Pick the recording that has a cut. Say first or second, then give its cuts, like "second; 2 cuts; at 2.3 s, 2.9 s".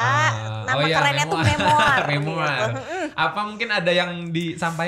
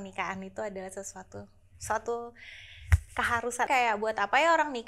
second; 1 cut; at 3.7 s